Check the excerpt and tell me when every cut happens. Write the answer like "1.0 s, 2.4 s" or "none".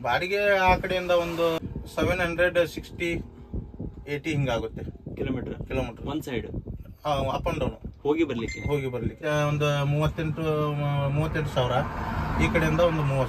1.6 s, 9.2 s